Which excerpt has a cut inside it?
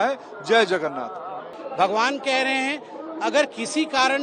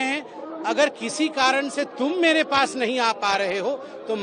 first; 1 cut; at 1.5 s

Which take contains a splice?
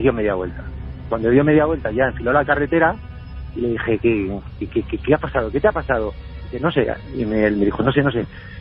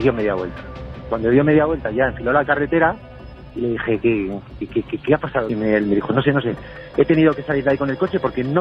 second; 1 cut; at 5.5 s

